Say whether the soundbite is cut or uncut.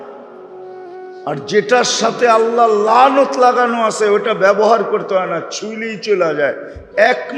uncut